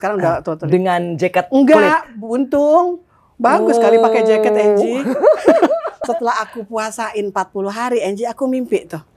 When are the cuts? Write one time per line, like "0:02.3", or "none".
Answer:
0:05.9